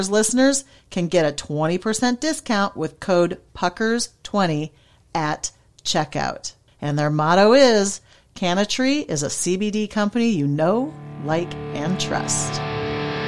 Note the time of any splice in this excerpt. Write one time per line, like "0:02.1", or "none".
0:12.2